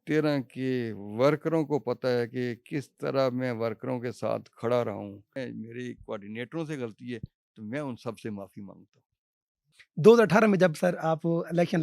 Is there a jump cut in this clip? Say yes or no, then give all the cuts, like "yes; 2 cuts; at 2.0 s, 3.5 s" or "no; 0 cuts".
yes; 2 cuts; at 5.4 s, 9.7 s